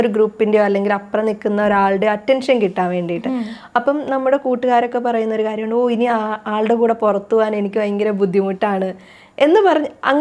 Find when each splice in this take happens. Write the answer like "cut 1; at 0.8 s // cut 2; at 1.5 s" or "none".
none